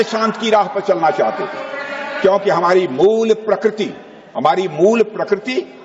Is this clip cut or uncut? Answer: uncut